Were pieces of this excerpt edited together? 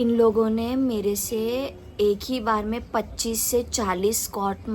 no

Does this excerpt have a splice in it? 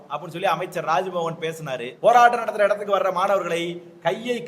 yes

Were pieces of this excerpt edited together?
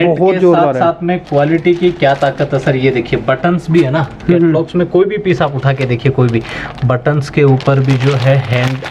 no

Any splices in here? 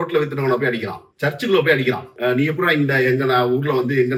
no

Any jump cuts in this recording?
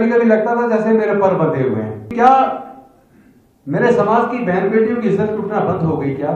yes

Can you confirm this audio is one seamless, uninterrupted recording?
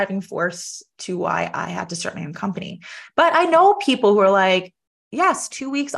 yes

